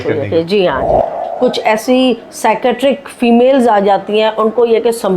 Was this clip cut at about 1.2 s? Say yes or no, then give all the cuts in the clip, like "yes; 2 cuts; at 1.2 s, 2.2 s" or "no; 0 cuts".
yes; 1 cut; at 1.2 s